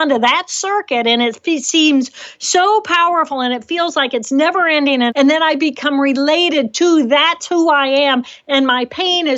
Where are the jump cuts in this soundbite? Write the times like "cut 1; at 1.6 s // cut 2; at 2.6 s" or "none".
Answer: cut 1; at 5.1 s